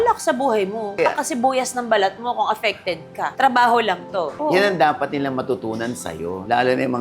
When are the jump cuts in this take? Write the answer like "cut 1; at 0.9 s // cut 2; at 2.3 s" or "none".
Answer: cut 1; at 1.0 s // cut 2; at 4.3 s